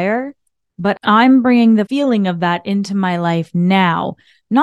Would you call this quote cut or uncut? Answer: cut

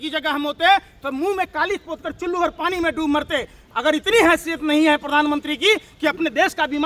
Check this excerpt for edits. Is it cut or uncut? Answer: uncut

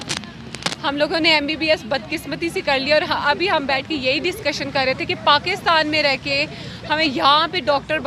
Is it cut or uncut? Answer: uncut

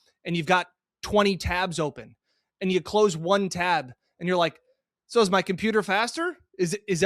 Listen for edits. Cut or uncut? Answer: uncut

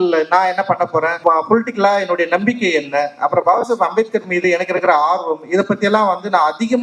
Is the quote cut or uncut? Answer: cut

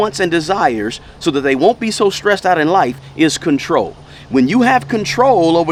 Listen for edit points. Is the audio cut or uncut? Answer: uncut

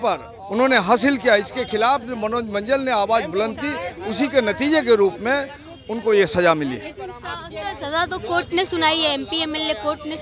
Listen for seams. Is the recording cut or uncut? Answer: uncut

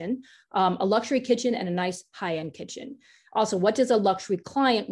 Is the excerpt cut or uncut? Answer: uncut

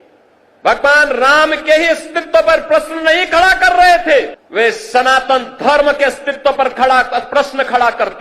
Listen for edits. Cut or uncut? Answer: cut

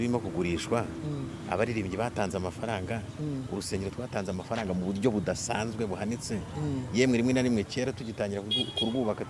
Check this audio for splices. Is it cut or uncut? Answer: uncut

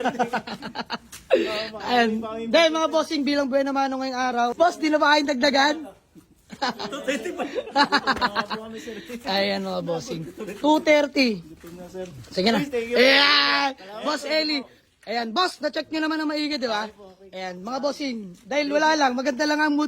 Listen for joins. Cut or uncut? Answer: cut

